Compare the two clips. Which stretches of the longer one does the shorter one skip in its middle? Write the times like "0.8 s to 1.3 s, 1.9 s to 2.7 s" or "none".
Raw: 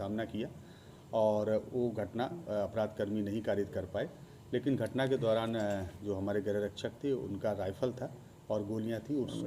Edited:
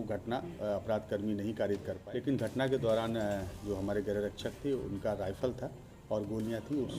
3.8 s to 4.3 s